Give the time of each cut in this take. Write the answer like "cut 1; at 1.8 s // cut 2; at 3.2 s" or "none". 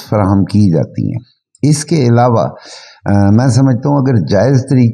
none